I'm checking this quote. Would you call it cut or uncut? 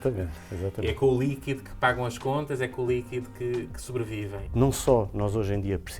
cut